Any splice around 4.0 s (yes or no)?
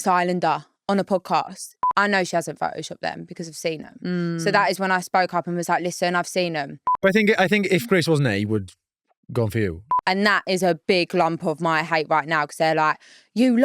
no